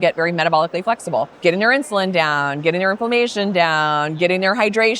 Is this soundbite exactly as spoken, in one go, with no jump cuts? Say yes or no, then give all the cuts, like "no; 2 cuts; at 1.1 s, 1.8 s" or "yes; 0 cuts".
no; 1 cut; at 1.3 s